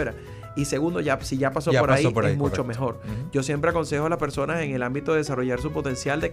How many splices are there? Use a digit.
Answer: 0